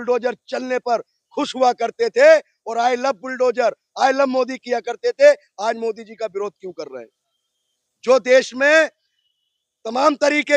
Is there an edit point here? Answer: no; 0 cuts

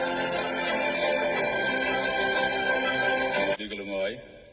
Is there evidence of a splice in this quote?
no; 0 cuts

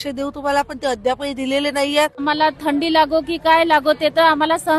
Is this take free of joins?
no; 1 cut; at 2.2 s

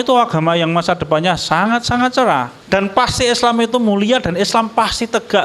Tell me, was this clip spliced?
yes; 1 cut; at 2.6 s

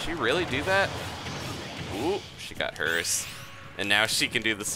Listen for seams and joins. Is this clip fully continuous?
yes; 0 cuts

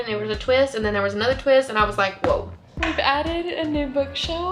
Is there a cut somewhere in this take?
yes; 1 cut; at 2.6 s

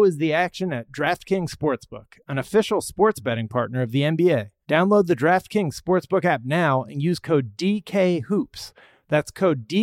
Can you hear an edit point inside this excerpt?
yes; 1 cut; at 4.5 s

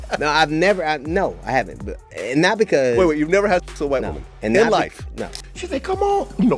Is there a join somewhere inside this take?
yes; 1 cut; at 5.5 s

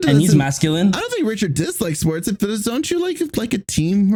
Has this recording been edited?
no; 0 cuts

